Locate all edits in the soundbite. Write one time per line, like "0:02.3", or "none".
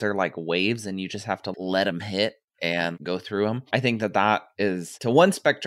0:01.5
0:03.0